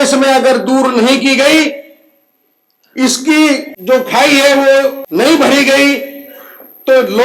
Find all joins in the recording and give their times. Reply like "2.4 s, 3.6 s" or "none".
3.7 s, 5.0 s